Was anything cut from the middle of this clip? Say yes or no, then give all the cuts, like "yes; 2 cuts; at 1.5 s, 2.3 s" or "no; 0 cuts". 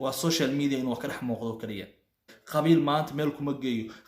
yes; 1 cut; at 2.3 s